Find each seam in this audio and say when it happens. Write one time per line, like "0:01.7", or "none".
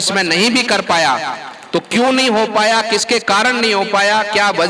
none